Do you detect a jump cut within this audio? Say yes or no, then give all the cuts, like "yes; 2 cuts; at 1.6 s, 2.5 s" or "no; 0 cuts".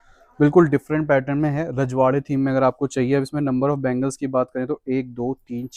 no; 0 cuts